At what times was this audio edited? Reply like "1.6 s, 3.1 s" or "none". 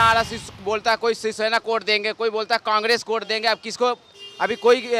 none